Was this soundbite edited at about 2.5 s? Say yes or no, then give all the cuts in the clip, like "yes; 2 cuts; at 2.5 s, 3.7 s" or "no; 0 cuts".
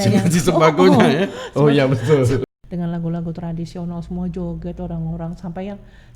yes; 1 cut; at 2.5 s